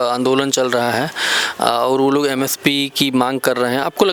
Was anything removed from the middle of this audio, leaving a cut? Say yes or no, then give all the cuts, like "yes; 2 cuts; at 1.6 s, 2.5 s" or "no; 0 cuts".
no; 0 cuts